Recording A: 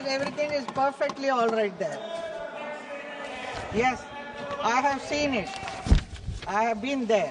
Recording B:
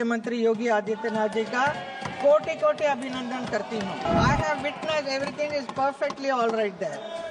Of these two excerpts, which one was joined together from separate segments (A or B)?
B